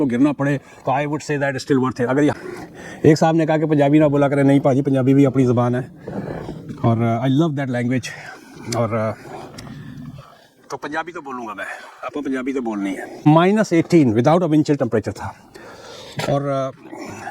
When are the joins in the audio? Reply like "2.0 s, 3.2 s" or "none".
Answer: 2.3 s, 13.1 s